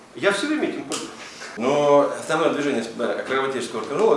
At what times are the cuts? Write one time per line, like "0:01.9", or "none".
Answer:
0:01.4